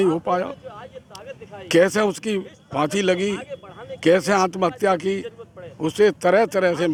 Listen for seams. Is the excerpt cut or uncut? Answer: uncut